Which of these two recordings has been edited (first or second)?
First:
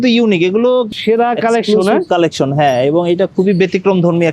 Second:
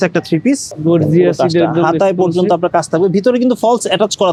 first